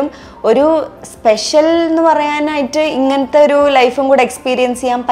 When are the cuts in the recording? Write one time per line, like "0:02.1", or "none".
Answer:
none